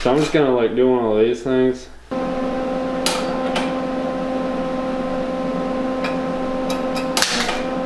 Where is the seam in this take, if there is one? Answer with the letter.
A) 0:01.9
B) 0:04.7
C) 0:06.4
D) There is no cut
A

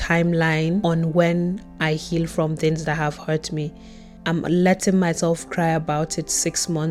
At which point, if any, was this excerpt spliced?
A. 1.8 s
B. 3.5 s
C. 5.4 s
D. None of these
D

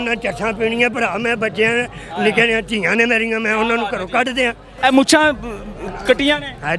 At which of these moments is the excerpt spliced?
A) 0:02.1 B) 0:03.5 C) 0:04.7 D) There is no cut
C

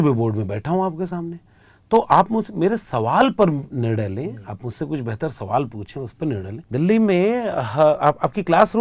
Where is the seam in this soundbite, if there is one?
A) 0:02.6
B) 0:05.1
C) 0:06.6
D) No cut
C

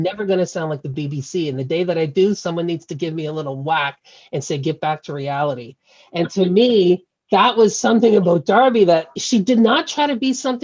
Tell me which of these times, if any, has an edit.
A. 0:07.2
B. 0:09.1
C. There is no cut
B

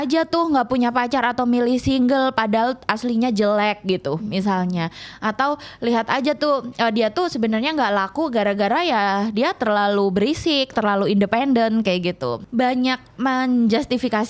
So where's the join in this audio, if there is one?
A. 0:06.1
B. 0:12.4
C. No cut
B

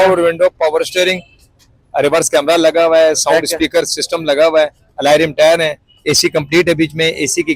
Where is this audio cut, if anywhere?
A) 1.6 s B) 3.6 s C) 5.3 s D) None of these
D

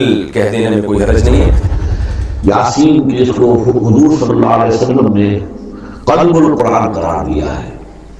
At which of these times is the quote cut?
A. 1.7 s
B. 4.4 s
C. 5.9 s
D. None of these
A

